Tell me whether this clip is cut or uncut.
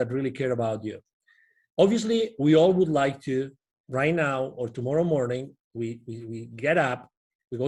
uncut